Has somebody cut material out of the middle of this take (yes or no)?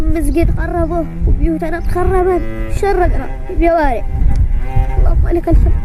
no